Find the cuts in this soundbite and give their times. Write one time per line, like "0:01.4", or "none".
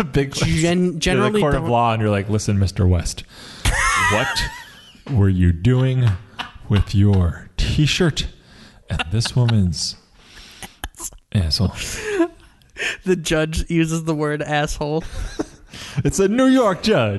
0:15.0